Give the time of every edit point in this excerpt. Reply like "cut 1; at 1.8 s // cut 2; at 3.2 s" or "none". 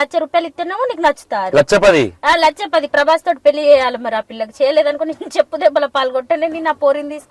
none